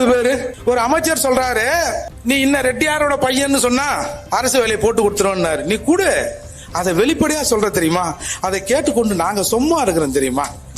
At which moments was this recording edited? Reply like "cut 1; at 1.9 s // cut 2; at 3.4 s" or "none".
none